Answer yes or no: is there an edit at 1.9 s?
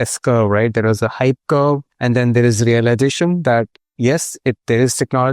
yes